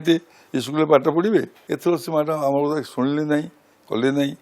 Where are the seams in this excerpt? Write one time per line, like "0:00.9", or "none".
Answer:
0:01.6